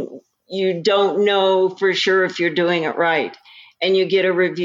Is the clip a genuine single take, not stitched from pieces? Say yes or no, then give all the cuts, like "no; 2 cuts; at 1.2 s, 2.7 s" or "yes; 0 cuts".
yes; 0 cuts